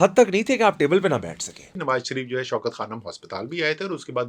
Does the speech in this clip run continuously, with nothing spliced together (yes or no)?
no